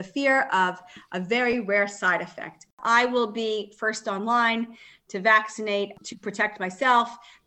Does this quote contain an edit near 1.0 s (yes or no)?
no